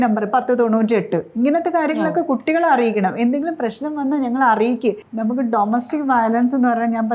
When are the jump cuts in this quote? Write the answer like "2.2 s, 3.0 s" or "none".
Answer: 5.1 s